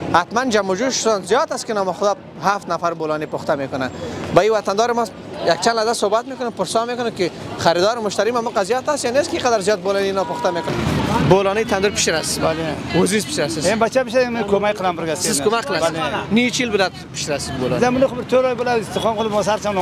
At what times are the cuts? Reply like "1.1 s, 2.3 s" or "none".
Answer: 10.7 s